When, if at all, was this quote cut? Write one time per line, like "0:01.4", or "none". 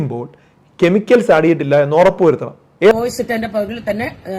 0:02.9

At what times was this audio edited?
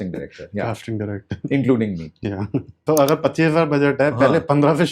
0:02.8

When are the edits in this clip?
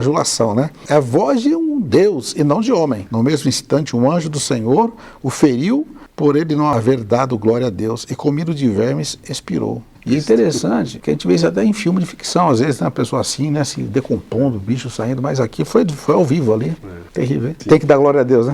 0:03.0
0:09.9
0:10.9
0:17.4

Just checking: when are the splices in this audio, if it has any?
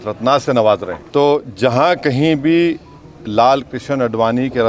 0:01.0

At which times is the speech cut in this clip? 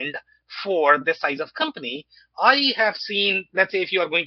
none

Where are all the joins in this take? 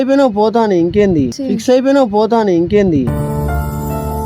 none

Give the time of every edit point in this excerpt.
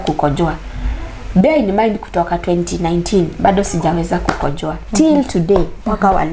none

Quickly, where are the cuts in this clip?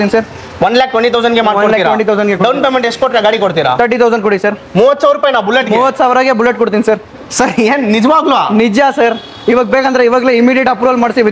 none

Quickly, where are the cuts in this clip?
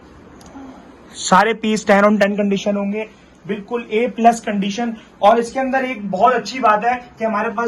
none

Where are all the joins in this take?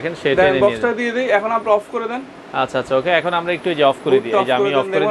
none

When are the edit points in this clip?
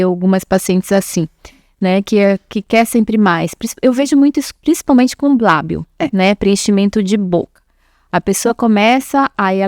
none

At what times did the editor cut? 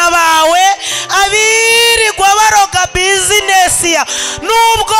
none

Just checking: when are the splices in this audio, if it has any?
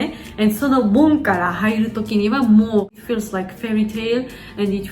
0:03.0

